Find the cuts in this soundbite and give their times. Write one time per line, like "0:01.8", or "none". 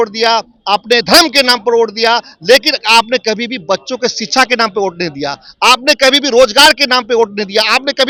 none